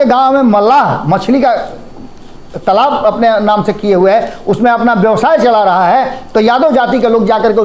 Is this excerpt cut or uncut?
uncut